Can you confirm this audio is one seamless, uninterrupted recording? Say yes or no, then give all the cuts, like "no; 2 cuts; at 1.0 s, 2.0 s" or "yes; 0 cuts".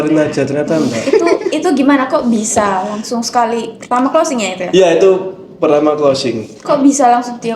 no; 1 cut; at 1.0 s